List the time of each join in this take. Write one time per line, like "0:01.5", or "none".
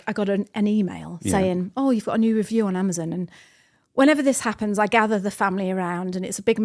none